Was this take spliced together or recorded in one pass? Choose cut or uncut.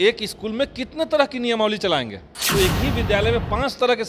cut